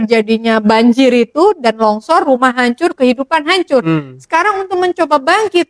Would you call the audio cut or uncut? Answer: uncut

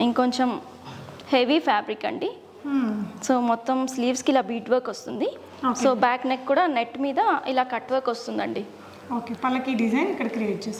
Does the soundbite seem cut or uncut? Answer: uncut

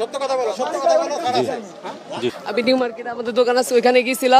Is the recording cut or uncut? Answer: cut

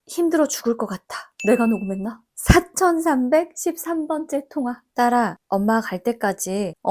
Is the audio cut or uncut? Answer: cut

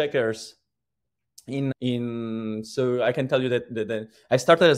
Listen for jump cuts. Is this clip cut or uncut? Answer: cut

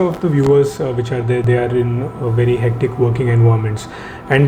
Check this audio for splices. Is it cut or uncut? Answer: cut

